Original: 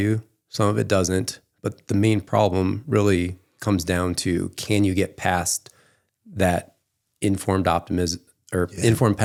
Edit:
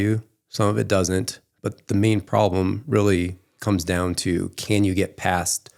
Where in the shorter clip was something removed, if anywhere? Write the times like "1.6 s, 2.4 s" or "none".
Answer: none